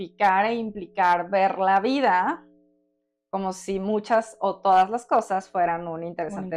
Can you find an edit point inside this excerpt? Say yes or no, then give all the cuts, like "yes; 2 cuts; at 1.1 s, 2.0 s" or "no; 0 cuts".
no; 0 cuts